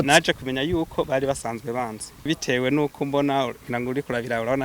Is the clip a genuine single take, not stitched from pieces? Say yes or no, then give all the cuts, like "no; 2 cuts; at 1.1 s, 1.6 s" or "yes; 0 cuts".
no; 1 cut; at 2.3 s